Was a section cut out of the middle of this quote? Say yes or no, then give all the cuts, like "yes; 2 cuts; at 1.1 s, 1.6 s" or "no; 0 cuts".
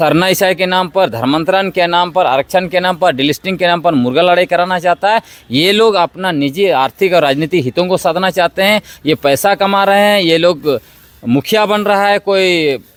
no; 0 cuts